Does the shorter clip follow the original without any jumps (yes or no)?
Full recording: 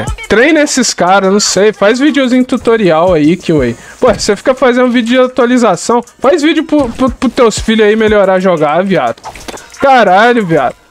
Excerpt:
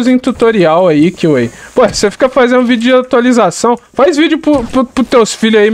yes